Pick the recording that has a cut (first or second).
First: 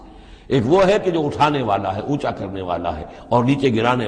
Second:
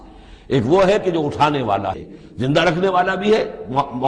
second